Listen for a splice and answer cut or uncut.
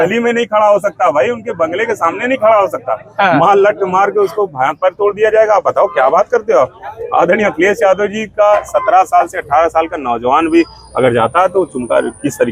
uncut